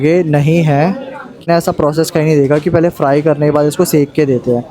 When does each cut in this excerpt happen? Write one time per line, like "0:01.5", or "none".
0:01.4